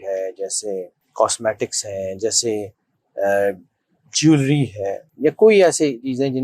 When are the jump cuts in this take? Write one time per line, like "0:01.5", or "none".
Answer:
0:01.0
0:05.0